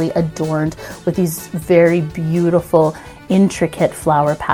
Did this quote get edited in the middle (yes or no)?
no